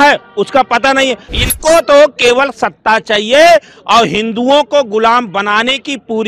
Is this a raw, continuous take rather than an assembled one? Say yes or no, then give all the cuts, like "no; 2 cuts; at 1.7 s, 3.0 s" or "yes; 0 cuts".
no; 1 cut; at 1.3 s